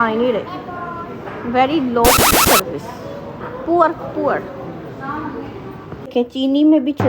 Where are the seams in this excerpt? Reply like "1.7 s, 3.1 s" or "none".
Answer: 6.0 s